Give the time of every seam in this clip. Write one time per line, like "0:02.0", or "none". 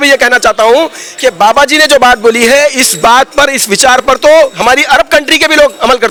none